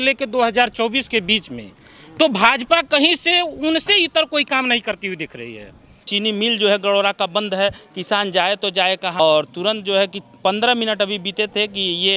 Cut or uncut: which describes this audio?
cut